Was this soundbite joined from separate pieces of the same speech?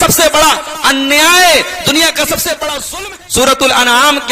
yes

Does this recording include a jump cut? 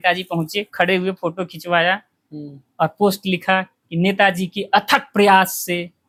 no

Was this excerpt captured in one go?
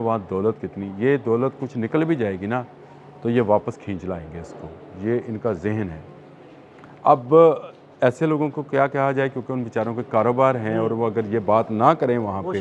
yes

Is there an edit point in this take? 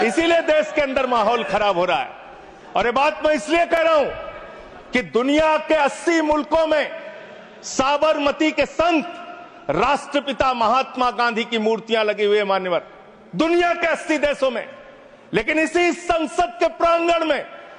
no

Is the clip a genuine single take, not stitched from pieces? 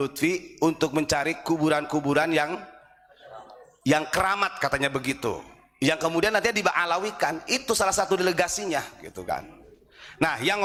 yes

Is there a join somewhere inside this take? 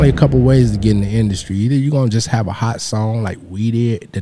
no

